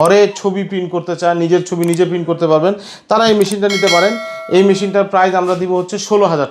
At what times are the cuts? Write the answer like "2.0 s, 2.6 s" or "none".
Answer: none